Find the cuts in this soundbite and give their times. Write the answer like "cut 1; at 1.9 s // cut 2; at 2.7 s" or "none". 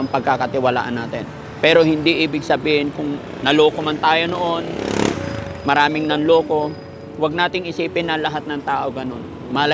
none